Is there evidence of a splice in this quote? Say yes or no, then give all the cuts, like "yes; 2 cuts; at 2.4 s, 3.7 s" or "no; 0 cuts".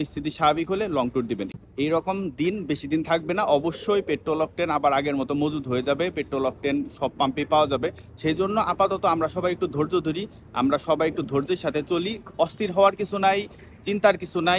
yes; 1 cut; at 1.5 s